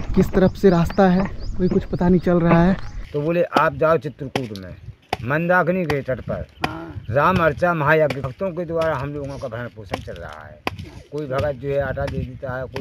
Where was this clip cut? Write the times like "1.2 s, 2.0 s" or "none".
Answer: 3.0 s, 8.2 s